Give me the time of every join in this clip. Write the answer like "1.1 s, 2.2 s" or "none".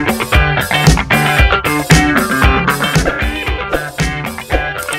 none